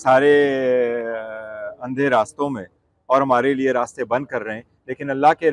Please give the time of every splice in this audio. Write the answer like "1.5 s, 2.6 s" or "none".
none